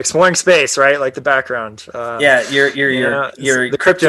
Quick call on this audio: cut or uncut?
uncut